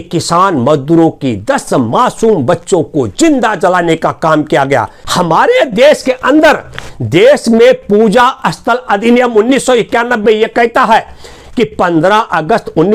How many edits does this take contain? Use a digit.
1